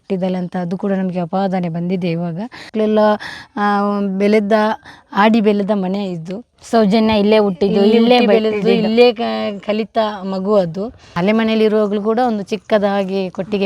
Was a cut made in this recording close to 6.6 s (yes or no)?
no